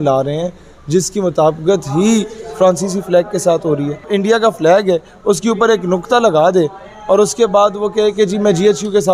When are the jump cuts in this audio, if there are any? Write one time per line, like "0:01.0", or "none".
0:04.1